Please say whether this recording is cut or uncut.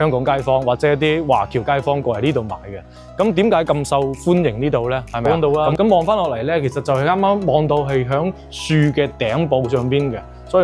cut